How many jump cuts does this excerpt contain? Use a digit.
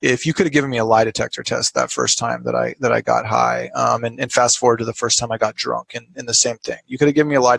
0